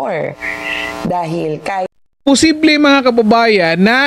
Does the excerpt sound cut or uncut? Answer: cut